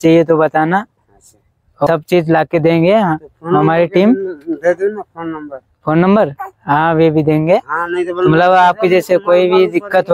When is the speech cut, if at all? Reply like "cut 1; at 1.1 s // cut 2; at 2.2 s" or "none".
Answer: cut 1; at 1.9 s

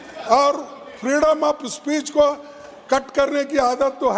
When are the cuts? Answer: none

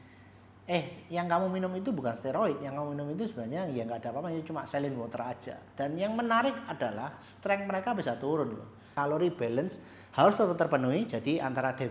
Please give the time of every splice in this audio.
cut 1; at 8.9 s

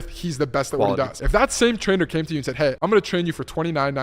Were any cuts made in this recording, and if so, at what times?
cut 1; at 1.2 s // cut 2; at 2.8 s

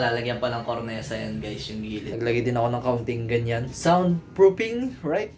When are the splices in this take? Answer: none

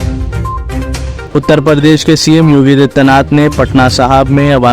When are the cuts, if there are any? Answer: cut 1; at 1.2 s

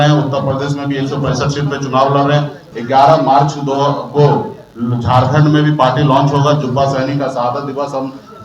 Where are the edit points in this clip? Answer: cut 1; at 2.6 s

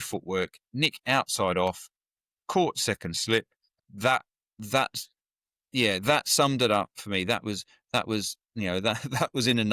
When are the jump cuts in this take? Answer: none

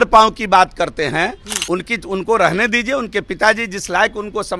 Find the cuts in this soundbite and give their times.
cut 1; at 1.5 s

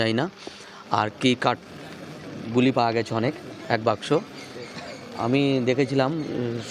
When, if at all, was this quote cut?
none

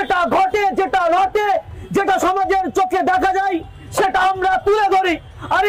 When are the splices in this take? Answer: none

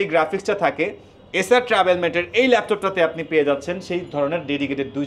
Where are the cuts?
none

